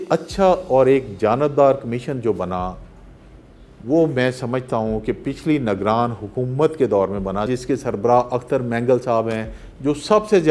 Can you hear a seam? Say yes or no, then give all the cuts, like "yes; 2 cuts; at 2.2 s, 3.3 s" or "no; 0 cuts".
no; 0 cuts